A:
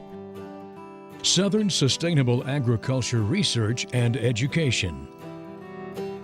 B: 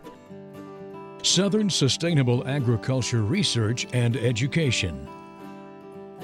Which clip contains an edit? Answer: A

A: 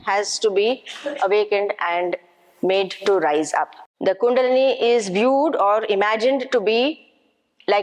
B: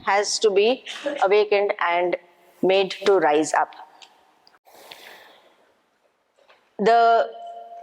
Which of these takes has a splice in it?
A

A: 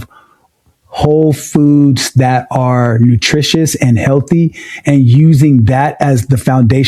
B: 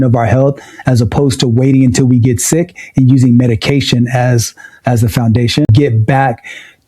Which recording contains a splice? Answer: B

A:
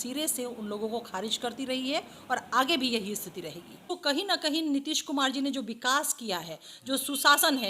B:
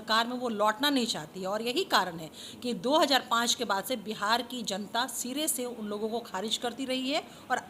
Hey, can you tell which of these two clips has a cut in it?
A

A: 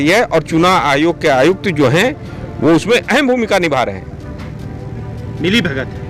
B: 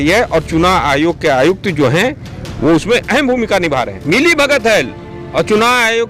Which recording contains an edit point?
B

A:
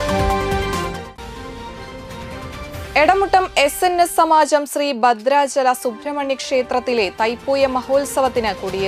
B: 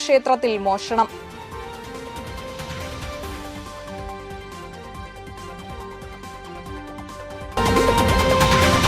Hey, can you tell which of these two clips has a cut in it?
B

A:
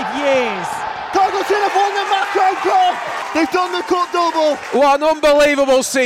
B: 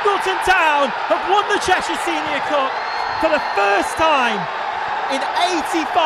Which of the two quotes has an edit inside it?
A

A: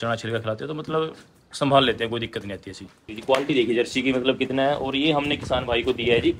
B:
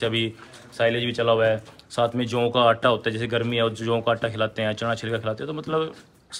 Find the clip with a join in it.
A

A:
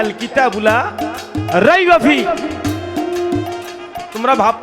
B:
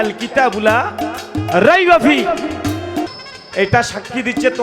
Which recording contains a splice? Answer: B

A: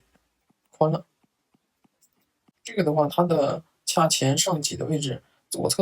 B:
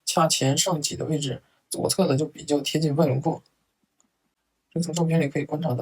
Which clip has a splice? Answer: A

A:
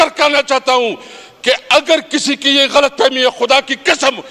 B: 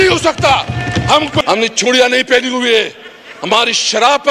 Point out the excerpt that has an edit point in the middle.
B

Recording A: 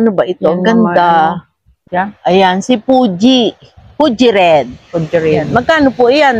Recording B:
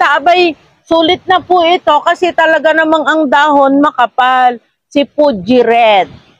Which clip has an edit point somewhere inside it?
A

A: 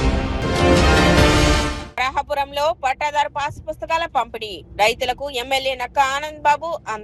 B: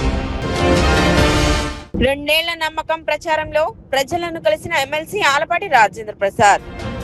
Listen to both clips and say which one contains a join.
A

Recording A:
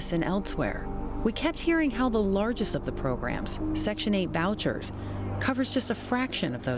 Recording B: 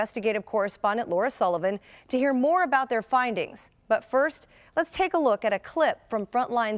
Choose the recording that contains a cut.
A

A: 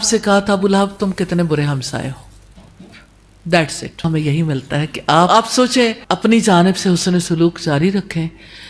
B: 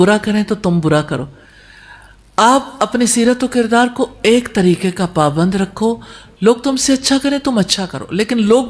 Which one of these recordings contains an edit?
A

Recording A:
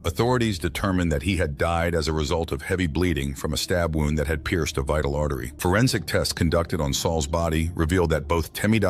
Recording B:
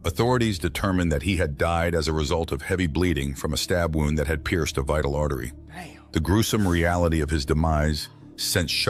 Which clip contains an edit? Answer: A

